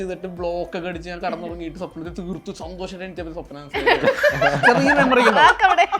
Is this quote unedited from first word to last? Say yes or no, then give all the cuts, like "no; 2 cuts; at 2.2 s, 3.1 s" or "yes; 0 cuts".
yes; 0 cuts